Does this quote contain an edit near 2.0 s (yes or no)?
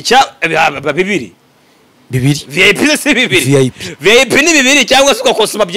no